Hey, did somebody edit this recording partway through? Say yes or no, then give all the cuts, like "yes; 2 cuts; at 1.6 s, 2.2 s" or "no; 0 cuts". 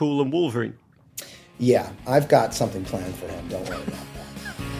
no; 0 cuts